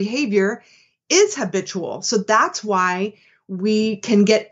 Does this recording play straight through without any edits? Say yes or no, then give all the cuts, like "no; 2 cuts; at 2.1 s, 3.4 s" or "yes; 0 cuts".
yes; 0 cuts